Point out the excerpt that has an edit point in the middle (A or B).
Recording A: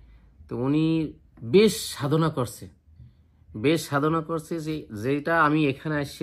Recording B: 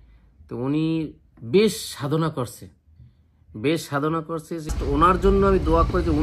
B